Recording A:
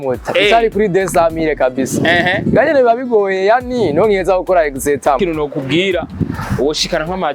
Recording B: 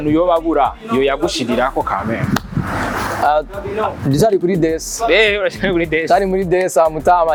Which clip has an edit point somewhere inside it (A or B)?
A